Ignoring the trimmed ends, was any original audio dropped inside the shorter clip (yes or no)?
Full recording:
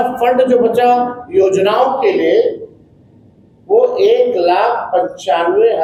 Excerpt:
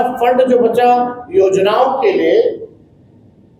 no